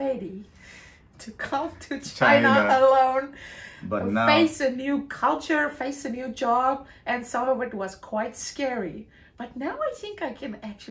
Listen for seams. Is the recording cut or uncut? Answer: uncut